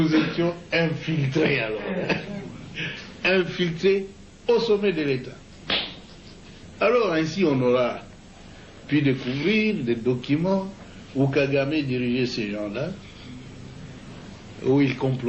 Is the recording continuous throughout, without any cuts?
yes; 0 cuts

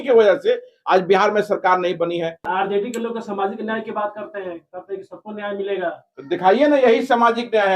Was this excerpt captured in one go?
no; 1 cut; at 2.4 s

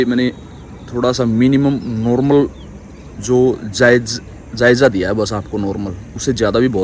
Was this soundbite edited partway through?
no; 0 cuts

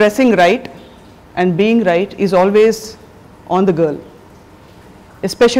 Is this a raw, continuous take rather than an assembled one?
yes; 0 cuts

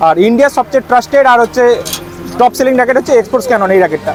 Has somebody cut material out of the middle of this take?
no; 0 cuts

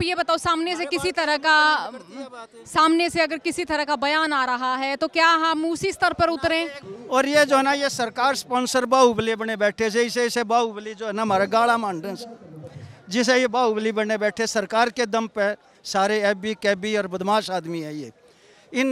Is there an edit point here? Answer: yes; 2 cuts; at 6.8 s, 15.8 s

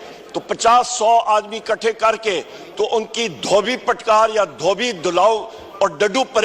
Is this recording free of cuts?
yes; 0 cuts

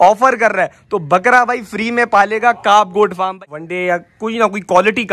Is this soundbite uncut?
no; 1 cut; at 3.5 s

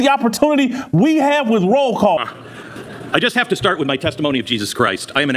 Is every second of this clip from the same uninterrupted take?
no; 1 cut; at 2.2 s

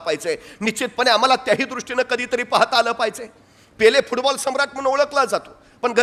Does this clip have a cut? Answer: no; 0 cuts

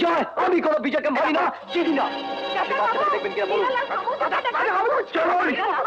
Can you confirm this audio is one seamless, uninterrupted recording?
yes; 0 cuts

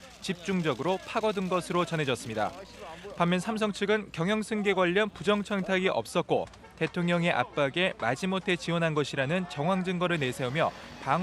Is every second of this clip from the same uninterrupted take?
no; 1 cut; at 1.5 s

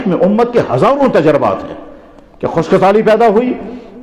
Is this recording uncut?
yes; 0 cuts

